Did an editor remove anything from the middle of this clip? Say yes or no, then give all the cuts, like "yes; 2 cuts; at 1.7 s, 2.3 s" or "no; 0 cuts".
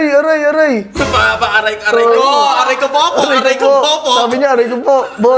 no; 0 cuts